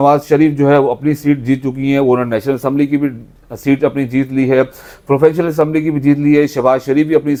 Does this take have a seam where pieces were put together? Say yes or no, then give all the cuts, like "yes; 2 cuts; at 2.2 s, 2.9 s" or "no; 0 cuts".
no; 0 cuts